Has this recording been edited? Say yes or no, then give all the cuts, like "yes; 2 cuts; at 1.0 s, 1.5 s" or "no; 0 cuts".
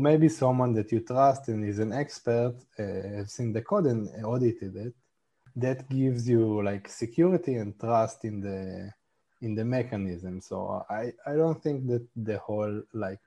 yes; 1 cut; at 5.4 s